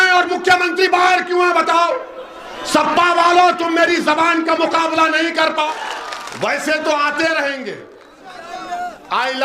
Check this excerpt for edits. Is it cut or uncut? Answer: cut